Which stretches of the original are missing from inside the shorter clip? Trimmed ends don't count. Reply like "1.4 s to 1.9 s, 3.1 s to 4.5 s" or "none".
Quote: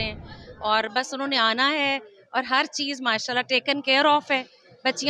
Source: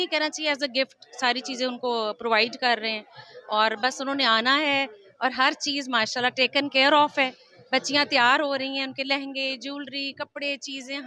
none